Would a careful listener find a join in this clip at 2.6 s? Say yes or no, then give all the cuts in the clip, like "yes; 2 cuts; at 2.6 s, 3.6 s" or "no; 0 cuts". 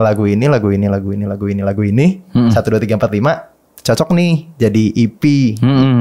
no; 0 cuts